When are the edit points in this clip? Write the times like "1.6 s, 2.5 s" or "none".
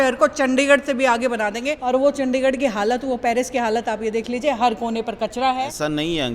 2.0 s, 5.3 s